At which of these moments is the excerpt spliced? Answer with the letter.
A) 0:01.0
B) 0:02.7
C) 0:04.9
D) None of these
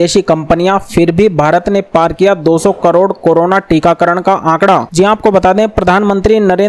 D